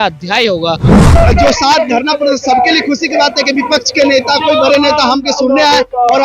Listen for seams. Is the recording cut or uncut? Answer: cut